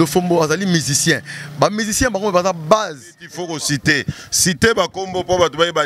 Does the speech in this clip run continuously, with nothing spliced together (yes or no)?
no